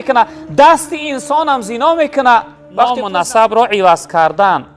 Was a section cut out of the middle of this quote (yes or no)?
yes